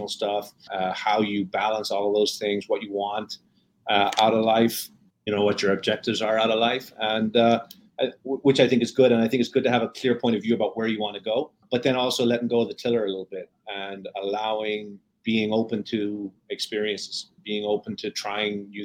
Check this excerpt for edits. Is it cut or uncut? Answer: cut